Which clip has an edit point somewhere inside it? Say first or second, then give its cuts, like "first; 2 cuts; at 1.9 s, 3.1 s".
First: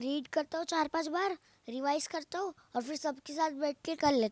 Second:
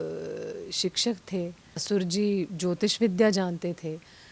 second; 1 cut; at 1.8 s